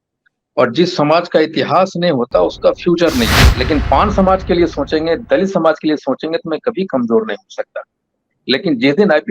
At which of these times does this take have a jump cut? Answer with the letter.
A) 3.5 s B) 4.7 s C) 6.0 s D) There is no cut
A